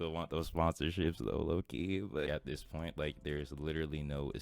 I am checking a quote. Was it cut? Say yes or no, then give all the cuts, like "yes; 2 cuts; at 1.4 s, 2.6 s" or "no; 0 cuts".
yes; 1 cut; at 2.3 s